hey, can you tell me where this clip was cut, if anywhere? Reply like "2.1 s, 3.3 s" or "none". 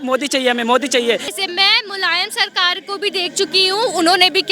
1.3 s